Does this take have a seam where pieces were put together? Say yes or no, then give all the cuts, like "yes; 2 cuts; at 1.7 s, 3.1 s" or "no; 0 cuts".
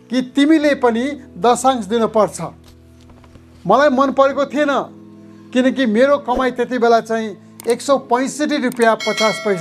no; 0 cuts